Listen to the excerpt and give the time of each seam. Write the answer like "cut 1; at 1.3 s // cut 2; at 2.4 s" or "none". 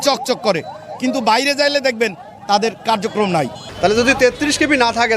cut 1; at 3.6 s